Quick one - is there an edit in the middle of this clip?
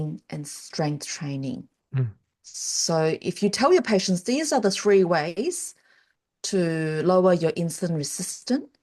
no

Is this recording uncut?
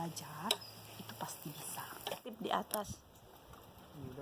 no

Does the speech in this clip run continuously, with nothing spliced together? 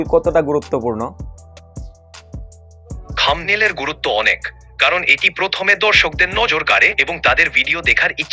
yes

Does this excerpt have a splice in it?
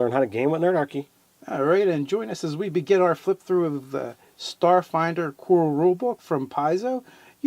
yes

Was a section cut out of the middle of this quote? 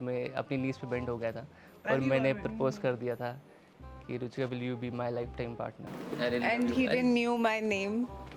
no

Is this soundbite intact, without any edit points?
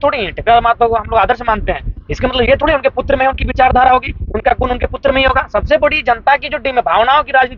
yes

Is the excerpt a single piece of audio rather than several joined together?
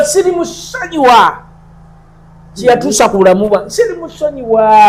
yes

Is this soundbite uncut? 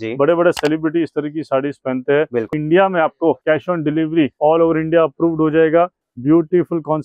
no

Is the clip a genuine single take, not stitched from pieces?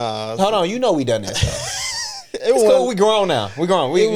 yes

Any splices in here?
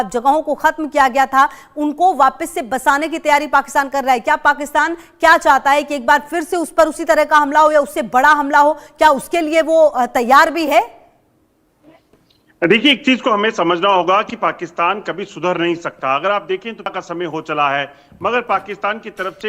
yes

